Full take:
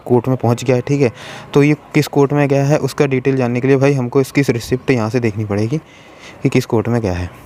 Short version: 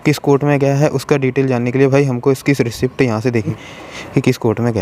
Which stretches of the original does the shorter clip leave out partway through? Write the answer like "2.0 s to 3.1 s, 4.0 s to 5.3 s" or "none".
5.4 s to 5.8 s

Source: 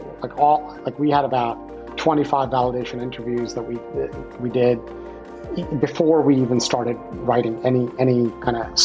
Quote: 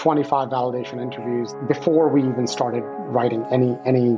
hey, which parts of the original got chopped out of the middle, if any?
3.6 s to 5.7 s

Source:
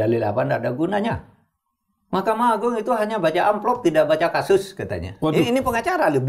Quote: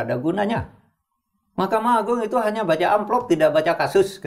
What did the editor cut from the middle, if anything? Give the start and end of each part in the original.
none

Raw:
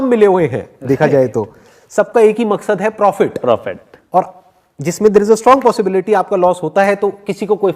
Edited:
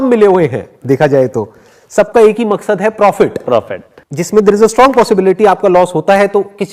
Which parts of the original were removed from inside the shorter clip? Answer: 3.5 s to 4.2 s

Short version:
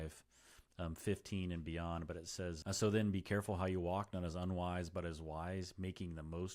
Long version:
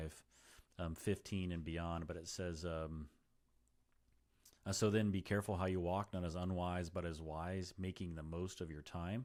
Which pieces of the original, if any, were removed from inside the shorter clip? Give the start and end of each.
2.6 s to 4.6 s

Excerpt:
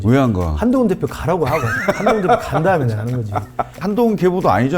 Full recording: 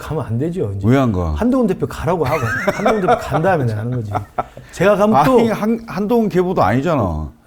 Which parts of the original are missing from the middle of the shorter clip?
4.6 s to 5.9 s

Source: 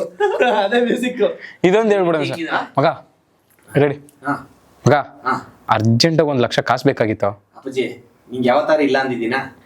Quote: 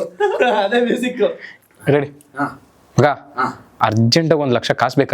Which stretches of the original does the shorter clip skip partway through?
1.5 s to 3.3 s

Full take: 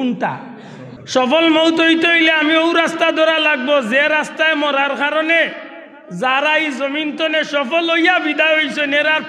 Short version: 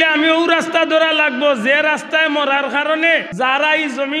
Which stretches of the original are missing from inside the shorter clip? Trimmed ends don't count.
5.5 s to 6.1 s

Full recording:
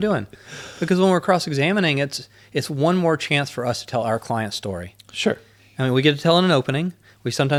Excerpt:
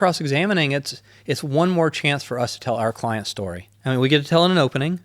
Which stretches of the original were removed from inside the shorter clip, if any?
4.9 s to 5.6 s

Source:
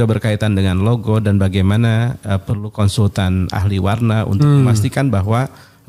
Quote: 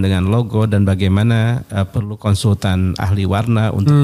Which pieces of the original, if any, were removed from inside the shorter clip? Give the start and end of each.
none

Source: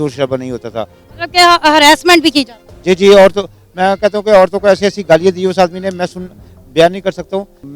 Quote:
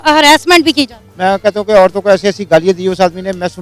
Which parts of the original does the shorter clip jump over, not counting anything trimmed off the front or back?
2.6 s to 3.6 s

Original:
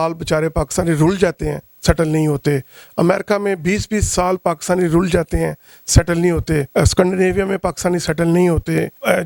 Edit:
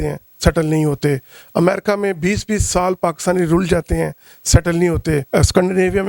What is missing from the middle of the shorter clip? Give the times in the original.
none

